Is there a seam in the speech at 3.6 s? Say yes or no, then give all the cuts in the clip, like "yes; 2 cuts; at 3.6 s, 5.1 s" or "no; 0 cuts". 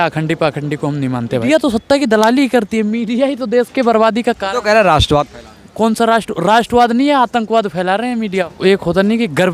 no; 2 cuts; at 1.4 s, 8.4 s